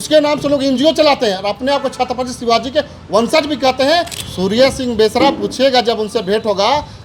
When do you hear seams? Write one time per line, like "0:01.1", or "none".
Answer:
0:04.2